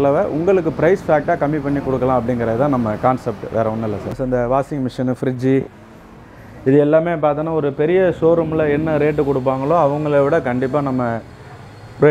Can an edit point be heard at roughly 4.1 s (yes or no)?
yes